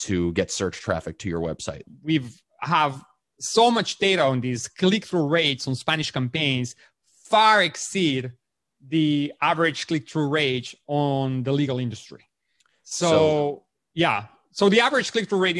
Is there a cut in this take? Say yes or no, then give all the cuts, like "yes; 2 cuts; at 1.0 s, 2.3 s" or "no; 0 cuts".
yes; 1 cut; at 1.9 s